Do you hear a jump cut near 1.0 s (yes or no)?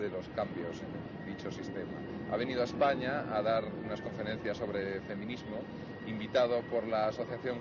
yes